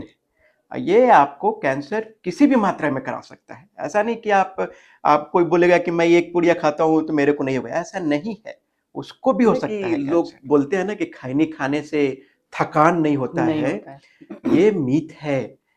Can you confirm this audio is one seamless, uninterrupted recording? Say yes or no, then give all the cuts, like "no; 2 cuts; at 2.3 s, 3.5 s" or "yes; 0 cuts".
no; 1 cut; at 9.7 s